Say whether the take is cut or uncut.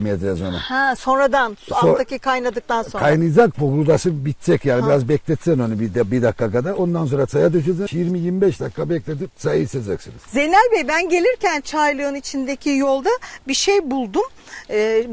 uncut